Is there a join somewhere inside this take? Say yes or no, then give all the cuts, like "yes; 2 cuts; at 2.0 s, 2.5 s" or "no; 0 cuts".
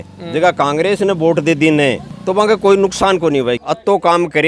yes; 2 cuts; at 2.1 s, 3.6 s